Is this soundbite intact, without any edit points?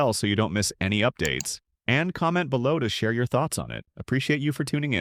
yes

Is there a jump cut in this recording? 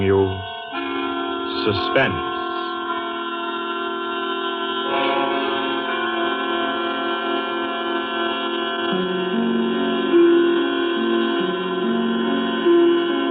no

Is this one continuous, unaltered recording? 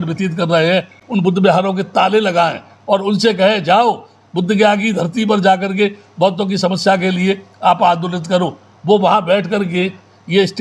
yes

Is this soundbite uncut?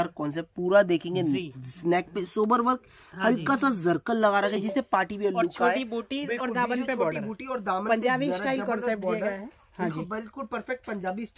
yes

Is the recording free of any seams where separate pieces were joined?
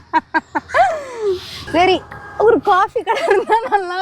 no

